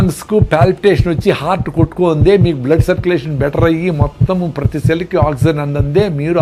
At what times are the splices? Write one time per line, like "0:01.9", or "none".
none